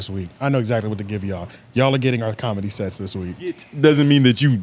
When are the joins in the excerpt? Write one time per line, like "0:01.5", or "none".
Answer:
0:03.7